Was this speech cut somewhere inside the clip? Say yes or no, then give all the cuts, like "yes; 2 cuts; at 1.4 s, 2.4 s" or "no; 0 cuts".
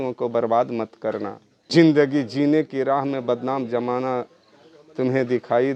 yes; 1 cut; at 1.7 s